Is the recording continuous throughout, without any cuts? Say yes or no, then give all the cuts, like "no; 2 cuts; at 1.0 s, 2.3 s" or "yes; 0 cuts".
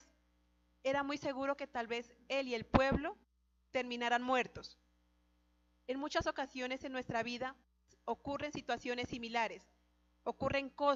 yes; 0 cuts